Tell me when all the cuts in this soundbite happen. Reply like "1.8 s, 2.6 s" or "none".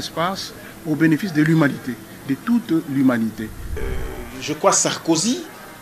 3.8 s